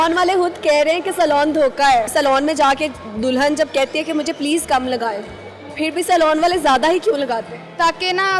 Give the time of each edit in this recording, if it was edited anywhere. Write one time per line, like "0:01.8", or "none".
0:02.1